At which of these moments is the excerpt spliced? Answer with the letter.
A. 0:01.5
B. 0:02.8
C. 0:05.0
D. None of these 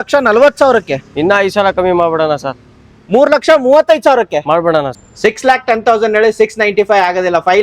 C